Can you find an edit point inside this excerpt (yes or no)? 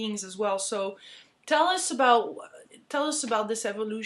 yes